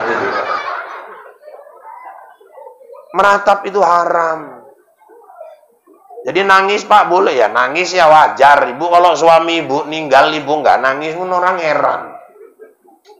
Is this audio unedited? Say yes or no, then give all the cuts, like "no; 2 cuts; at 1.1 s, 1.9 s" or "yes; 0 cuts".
yes; 0 cuts